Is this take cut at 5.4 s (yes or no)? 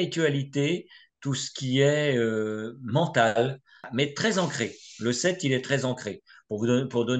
no